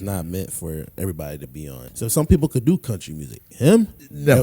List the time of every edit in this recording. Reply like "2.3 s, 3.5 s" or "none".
1.8 s

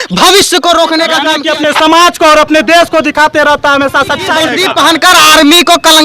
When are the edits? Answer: 1.3 s, 4.5 s

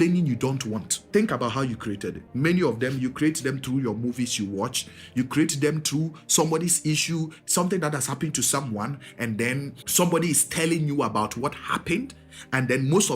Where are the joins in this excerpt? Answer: 0.9 s, 2.2 s, 9.8 s

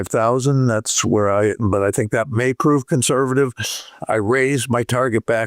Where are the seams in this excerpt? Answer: none

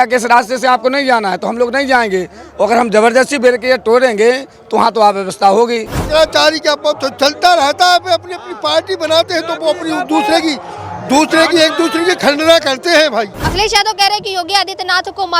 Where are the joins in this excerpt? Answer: 5.9 s, 13.4 s

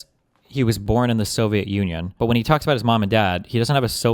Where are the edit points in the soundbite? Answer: 0.8 s, 2.0 s

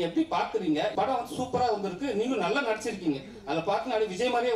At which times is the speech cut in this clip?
0.9 s

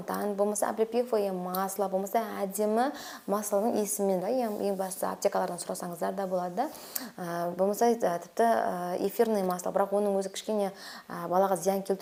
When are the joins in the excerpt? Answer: none

